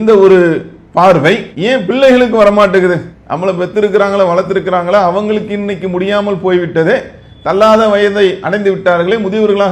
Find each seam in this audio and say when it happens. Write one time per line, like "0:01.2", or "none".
none